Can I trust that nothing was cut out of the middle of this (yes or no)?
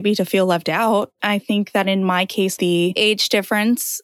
no